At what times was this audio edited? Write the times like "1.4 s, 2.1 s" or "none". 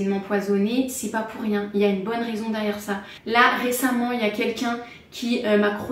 none